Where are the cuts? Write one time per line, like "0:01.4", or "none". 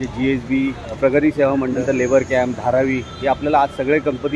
0:01.0
0:01.8